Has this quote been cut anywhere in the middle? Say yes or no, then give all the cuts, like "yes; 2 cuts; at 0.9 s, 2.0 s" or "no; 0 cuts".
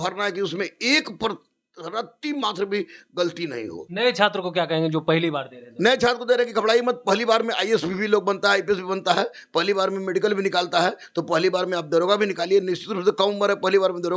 yes; 1 cut; at 3.8 s